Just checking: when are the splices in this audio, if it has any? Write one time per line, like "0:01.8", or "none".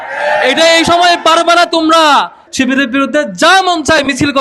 0:02.4